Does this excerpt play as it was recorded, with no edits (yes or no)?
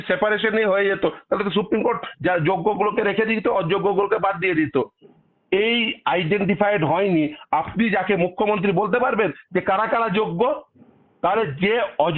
yes